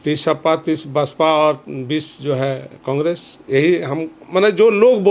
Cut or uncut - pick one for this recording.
uncut